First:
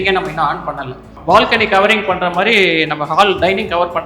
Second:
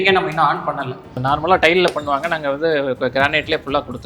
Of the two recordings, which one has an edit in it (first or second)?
second